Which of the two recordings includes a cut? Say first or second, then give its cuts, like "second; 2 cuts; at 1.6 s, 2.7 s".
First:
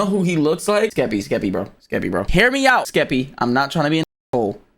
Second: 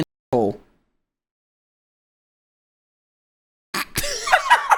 first; 3 cuts; at 0.9 s, 2.3 s, 2.9 s